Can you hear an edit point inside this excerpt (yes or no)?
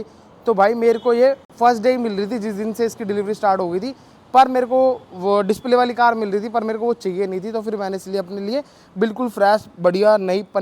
no